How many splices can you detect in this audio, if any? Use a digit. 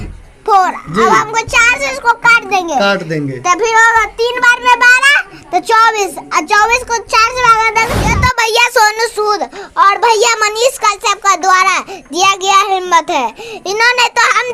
1